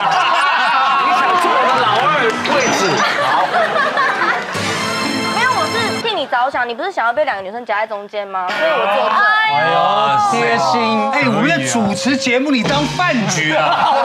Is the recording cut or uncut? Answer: uncut